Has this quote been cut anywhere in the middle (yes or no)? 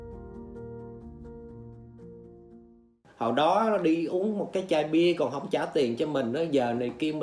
yes